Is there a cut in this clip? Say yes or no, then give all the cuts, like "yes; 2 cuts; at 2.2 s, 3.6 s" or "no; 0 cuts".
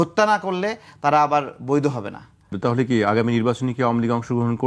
yes; 1 cut; at 2.5 s